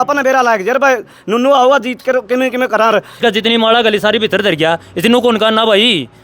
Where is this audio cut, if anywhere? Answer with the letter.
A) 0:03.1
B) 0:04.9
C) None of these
A